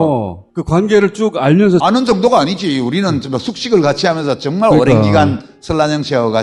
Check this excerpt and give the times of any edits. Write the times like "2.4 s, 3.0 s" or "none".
none